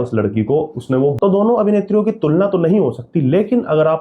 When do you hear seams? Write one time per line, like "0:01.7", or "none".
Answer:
0:01.2